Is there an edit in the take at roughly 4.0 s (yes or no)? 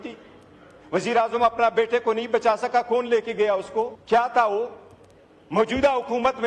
yes